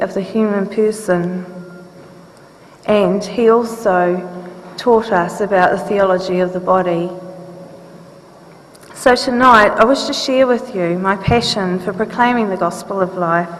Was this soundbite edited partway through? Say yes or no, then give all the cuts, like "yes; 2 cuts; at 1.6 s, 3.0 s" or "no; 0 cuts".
yes; 1 cut; at 12.3 s